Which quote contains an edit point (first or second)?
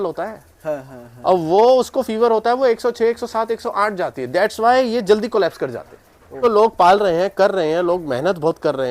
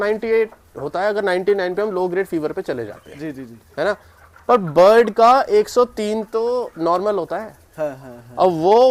first